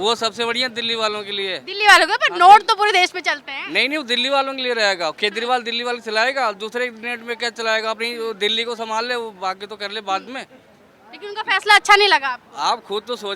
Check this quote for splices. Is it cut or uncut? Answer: uncut